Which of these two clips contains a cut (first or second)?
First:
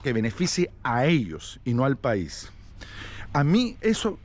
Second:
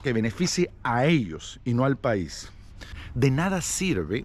second